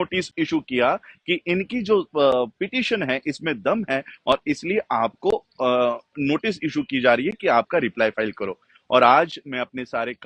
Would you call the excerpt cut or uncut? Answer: uncut